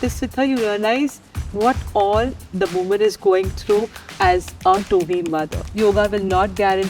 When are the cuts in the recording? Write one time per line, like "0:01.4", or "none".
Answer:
0:05.6